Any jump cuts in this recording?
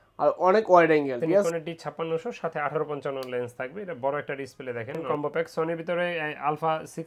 yes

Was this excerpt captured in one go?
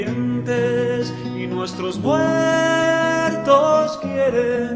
yes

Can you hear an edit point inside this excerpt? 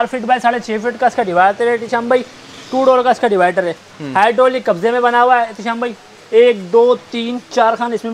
no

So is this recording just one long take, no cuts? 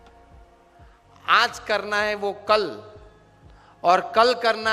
yes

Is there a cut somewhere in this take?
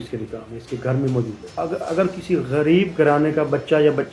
yes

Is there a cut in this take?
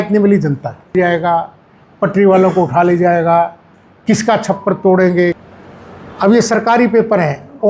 yes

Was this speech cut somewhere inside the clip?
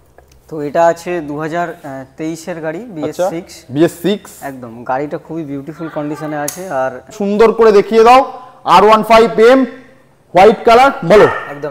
yes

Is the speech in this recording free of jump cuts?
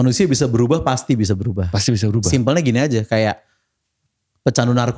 yes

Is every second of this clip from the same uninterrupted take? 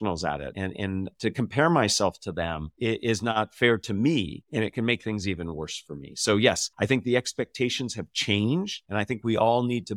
yes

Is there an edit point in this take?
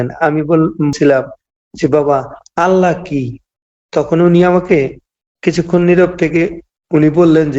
yes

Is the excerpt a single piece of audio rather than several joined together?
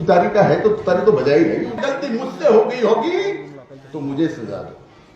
no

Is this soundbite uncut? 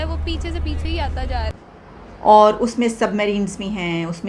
no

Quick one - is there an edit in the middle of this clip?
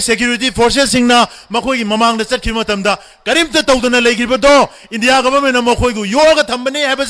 no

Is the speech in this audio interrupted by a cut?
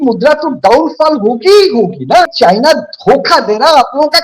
yes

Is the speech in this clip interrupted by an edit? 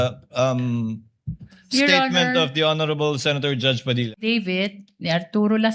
yes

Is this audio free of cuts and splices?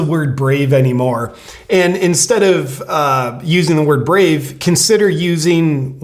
yes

